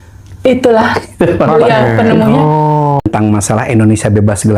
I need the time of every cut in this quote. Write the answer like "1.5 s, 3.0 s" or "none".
3.0 s